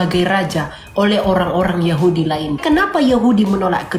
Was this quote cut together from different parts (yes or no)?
yes